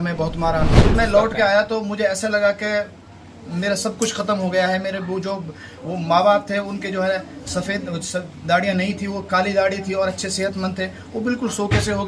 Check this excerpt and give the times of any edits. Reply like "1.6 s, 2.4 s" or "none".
0.9 s